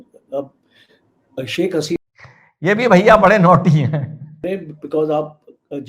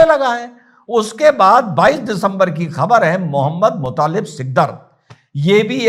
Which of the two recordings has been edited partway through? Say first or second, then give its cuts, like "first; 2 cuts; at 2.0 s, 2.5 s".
first; 2 cuts; at 2.0 s, 4.4 s